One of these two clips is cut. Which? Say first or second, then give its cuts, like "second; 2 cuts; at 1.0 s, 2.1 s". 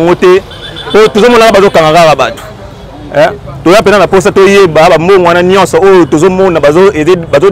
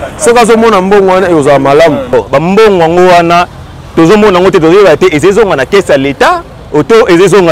second; 1 cut; at 2.1 s